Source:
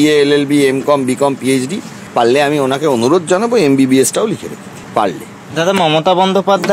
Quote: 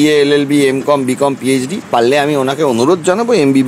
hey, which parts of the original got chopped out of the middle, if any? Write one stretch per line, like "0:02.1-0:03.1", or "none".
0:01.8-0:02.0